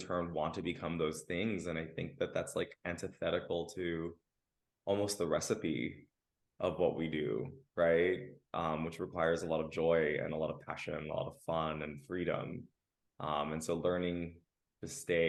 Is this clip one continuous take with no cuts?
yes; 0 cuts

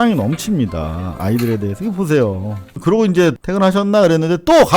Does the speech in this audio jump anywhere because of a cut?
yes; 2 cuts; at 2.8 s, 3.4 s

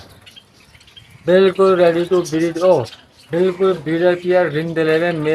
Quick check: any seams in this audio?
no; 0 cuts

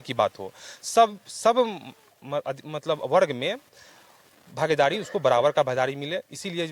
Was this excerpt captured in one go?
yes; 0 cuts

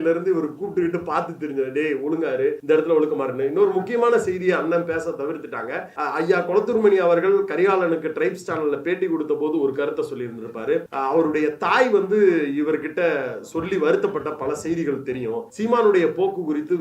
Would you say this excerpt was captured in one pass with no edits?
no; 4 cuts; at 2.6 s, 5.9 s, 10.9 s, 15.5 s

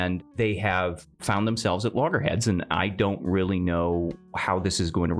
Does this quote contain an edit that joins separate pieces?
yes; 2 cuts; at 1.1 s, 4.2 s

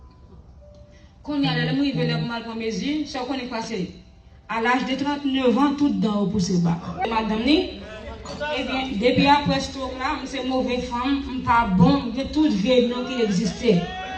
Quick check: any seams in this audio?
yes; 1 cut; at 7.0 s

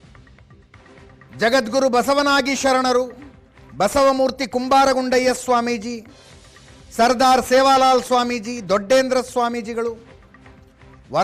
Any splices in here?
yes; 1 cut; at 1.3 s

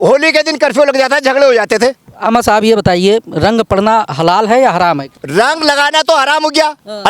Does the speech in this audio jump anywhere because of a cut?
yes; 2 cuts; at 2.1 s, 5.1 s

